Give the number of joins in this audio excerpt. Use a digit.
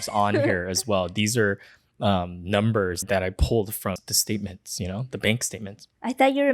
1